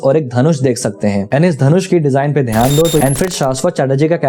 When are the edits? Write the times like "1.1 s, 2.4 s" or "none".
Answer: 3.0 s